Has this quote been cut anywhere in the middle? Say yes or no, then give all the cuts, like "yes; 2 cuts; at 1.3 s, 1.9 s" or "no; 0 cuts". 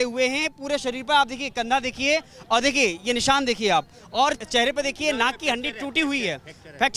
yes; 1 cut; at 4.4 s